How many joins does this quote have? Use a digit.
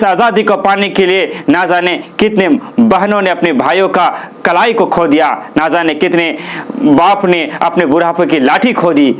0